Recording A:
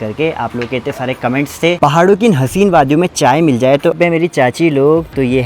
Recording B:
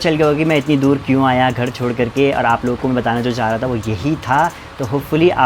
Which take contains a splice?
A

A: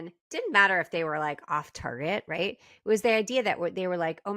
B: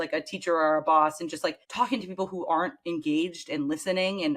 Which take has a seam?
B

